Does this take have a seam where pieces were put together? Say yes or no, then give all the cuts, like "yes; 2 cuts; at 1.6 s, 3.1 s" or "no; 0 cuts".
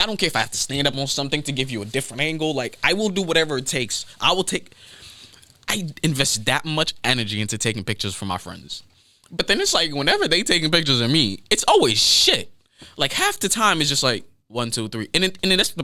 no; 0 cuts